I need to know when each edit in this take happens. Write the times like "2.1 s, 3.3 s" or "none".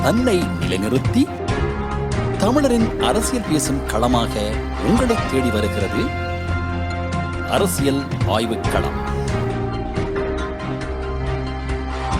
none